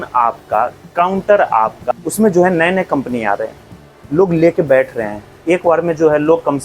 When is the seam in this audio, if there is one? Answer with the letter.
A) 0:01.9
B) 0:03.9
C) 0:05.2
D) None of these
A